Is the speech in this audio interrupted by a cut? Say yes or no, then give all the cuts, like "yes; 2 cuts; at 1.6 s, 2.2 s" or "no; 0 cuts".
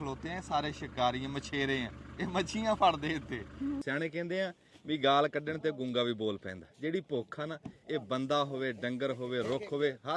yes; 1 cut; at 3.8 s